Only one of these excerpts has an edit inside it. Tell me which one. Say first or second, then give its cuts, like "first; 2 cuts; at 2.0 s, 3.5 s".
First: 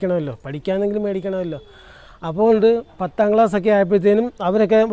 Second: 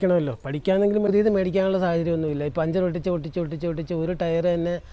second; 1 cut; at 1.1 s